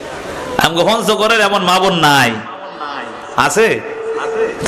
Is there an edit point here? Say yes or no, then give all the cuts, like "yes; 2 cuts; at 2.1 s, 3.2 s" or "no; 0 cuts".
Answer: no; 0 cuts